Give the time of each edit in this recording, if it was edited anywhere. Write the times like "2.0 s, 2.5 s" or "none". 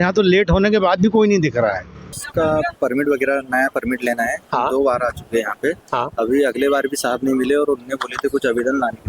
2.2 s